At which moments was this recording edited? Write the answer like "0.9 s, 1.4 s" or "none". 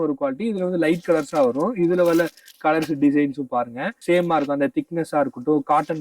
3.8 s